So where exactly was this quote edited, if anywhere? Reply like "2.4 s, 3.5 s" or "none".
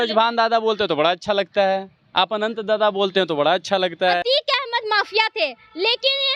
4.2 s